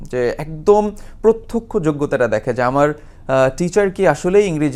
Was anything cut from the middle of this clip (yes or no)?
no